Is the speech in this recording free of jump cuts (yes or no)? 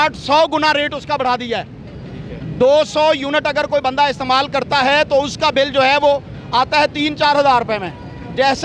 yes